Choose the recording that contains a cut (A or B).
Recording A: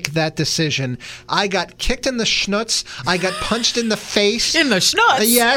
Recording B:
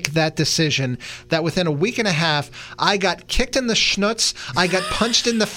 A